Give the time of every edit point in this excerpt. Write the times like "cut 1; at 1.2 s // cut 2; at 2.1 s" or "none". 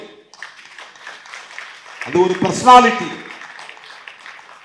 none